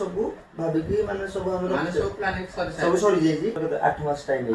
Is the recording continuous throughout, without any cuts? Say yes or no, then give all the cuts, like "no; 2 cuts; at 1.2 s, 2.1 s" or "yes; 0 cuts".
no; 1 cut; at 3.6 s